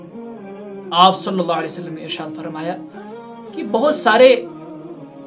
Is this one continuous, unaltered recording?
no; 1 cut; at 0.9 s

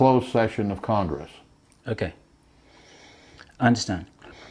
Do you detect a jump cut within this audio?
no; 0 cuts

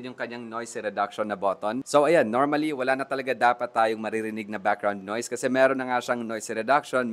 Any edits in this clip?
no; 0 cuts

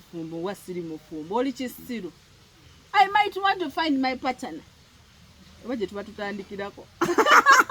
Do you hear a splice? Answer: no; 0 cuts

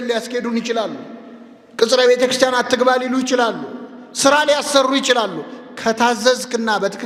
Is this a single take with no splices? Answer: yes; 0 cuts

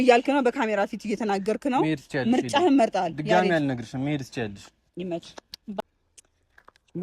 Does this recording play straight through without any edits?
no; 1 cut; at 5.8 s

